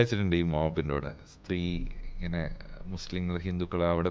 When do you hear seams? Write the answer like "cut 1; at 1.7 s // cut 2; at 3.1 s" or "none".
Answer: cut 1; at 1.3 s